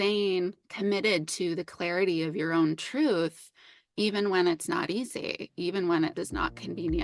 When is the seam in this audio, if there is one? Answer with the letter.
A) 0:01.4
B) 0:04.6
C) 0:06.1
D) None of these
C